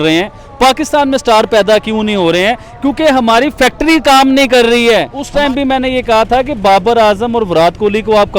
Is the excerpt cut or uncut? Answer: cut